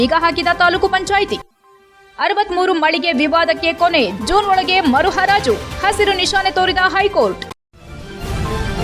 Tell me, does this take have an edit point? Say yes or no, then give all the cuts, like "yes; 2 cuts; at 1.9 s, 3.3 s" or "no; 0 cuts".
yes; 1 cut; at 7.4 s